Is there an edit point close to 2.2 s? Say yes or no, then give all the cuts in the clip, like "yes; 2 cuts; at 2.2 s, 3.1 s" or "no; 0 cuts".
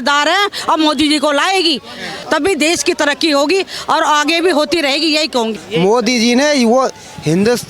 yes; 2 cuts; at 2.2 s, 5.5 s